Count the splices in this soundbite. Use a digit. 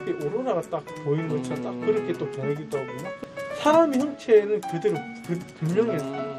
1